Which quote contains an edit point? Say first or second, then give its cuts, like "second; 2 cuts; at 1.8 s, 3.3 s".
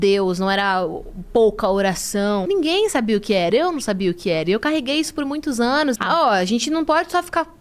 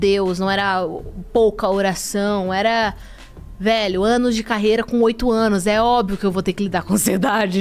first; 2 cuts; at 2.4 s, 6.0 s